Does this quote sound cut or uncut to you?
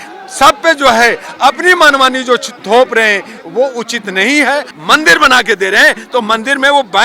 cut